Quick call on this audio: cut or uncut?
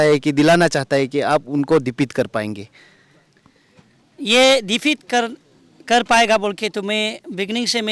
uncut